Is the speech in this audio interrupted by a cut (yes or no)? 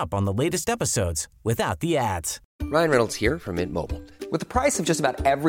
yes